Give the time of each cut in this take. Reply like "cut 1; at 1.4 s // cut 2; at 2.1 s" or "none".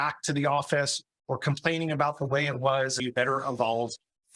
cut 1; at 3.0 s